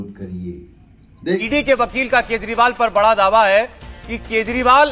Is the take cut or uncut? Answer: cut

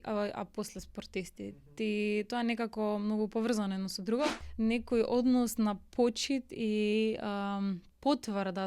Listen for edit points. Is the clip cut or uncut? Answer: cut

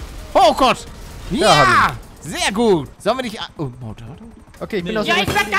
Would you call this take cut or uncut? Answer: cut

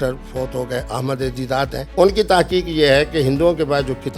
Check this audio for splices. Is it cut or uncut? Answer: cut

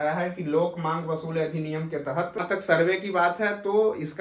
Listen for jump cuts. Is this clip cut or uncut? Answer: cut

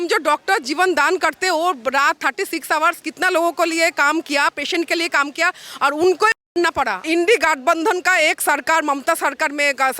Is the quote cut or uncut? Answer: cut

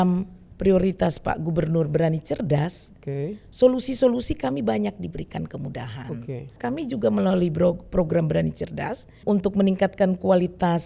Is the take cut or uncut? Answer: cut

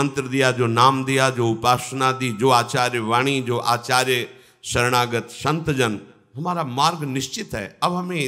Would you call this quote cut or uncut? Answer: uncut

